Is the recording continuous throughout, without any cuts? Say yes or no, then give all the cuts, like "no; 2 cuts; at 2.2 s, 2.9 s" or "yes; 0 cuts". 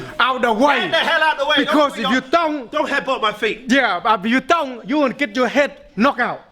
yes; 0 cuts